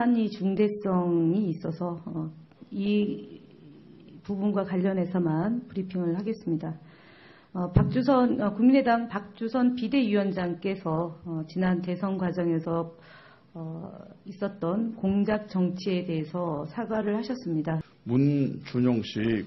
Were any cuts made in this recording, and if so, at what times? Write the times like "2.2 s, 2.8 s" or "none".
15.7 s

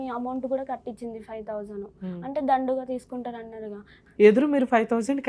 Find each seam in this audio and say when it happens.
4.0 s

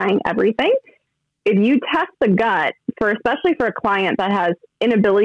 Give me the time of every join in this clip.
1.0 s

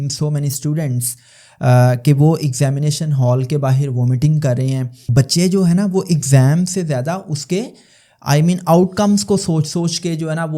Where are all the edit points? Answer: 4.9 s

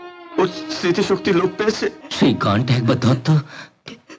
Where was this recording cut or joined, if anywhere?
2.0 s

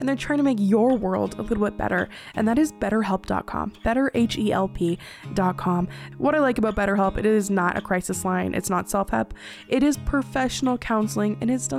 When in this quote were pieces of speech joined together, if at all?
6.0 s

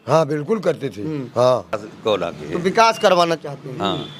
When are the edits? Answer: 1.7 s

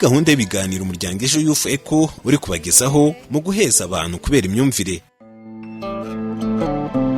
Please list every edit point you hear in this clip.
5.2 s

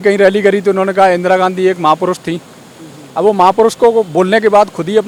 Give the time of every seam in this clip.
none

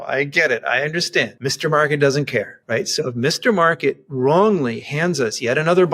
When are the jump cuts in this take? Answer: 1.3 s, 2.6 s

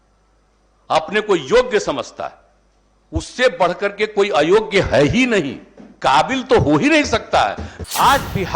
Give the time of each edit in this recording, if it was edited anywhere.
7.7 s

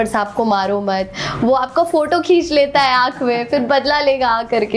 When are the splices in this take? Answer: none

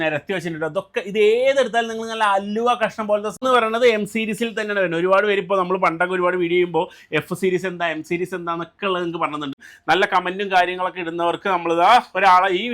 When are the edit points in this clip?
3.4 s, 9.7 s

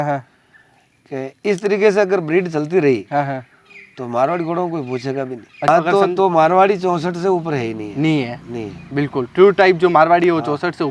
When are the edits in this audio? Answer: 5.7 s

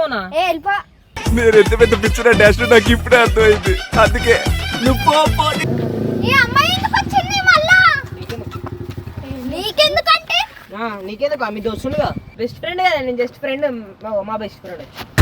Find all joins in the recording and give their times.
5.6 s, 12.2 s

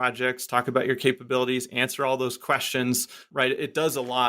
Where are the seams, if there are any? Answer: 3.2 s

